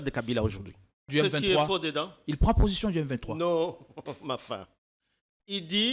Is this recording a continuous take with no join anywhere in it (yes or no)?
no